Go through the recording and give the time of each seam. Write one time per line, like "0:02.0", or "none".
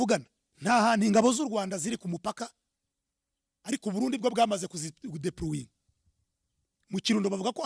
none

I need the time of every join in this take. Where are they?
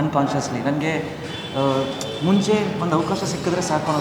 none

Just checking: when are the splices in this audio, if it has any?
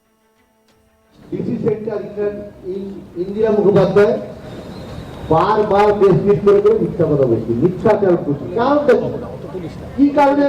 0:01.2

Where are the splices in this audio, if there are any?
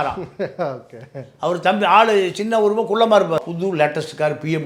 0:03.4

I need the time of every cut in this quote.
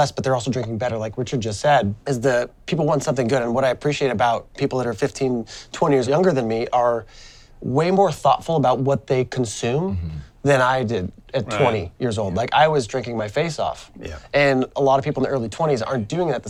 none

